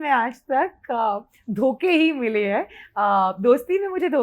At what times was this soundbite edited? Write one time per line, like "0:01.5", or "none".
none